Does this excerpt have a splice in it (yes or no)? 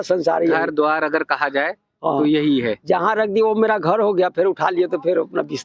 no